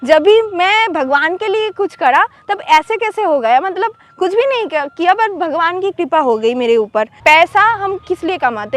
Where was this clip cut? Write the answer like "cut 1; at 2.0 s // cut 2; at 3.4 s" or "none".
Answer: cut 1; at 7.2 s